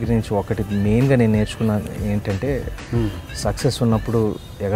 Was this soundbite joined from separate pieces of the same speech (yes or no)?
no